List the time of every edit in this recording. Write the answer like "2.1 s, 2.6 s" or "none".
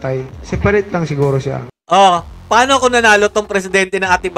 none